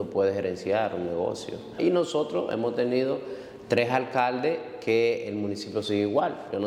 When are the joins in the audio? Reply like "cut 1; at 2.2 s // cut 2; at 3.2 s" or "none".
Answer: cut 1; at 1.8 s